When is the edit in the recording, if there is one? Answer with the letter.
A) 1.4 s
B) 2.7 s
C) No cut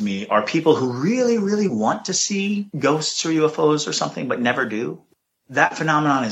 B